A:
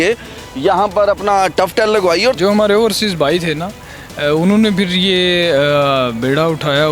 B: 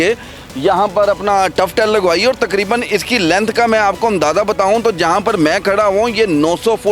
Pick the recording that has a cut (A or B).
A